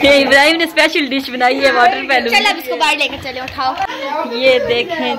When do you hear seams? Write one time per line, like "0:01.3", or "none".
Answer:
0:03.9